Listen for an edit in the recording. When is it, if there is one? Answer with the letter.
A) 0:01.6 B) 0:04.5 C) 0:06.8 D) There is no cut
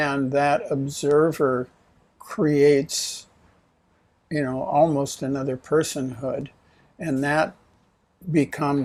D